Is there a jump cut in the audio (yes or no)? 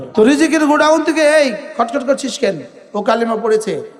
no